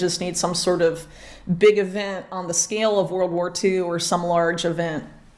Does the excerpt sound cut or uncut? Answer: uncut